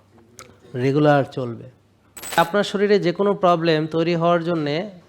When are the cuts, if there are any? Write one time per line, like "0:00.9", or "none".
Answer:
0:02.4

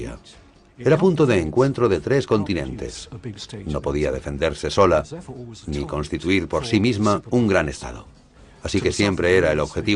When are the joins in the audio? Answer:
none

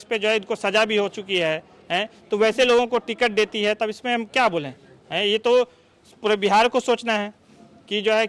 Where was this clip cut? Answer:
none

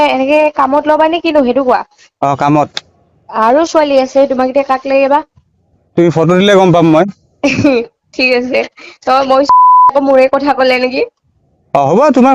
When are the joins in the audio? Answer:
0:09.7

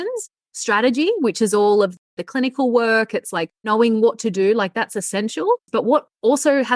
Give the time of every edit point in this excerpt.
0:05.7

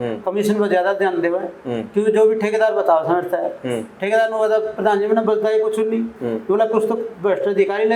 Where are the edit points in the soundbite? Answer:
none

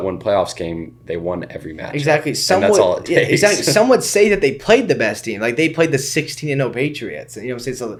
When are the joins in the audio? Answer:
none

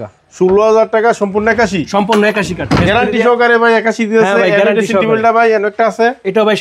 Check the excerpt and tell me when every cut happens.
none

